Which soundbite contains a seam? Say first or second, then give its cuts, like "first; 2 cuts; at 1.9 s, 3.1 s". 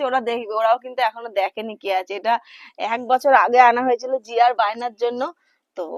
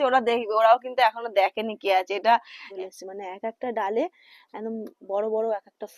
second; 1 cut; at 2.7 s